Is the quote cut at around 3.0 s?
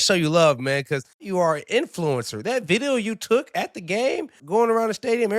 no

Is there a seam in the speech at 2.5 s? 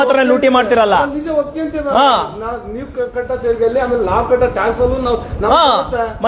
no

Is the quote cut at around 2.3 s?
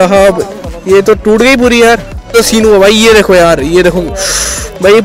yes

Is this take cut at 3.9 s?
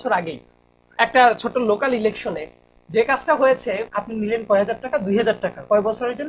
yes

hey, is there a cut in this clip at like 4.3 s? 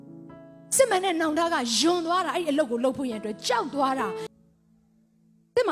yes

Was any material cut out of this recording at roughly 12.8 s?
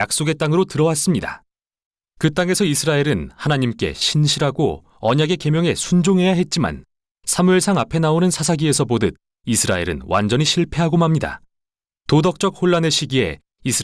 yes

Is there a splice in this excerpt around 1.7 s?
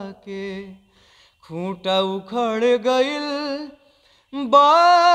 no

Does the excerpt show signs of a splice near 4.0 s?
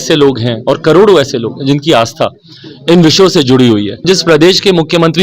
yes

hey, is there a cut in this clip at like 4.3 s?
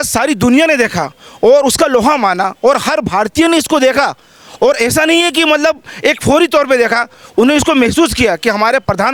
no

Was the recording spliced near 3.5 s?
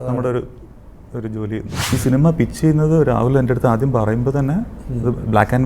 no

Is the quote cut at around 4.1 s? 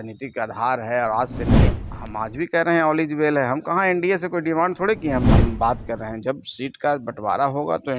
no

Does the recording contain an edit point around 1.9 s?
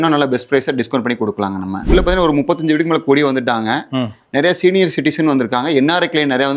yes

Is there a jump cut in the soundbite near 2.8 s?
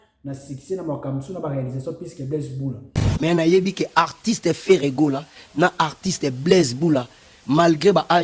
yes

